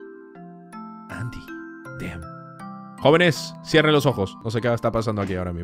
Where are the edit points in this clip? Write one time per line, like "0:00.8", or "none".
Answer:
0:04.4